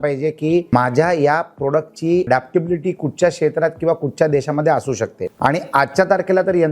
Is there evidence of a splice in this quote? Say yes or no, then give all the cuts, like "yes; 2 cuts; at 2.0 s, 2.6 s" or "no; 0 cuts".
yes; 3 cuts; at 0.7 s, 2.3 s, 5.2 s